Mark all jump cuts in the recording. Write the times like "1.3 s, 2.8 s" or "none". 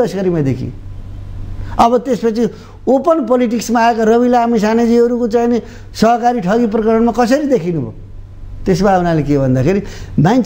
none